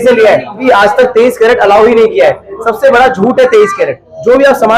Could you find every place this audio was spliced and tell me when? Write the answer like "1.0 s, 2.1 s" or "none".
none